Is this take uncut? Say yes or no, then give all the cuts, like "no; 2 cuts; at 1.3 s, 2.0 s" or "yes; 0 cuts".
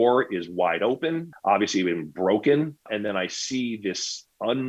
no; 2 cuts; at 1.3 s, 2.9 s